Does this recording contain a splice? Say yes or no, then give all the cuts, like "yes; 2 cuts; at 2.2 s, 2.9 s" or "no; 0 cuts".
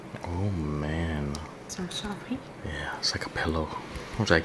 no; 0 cuts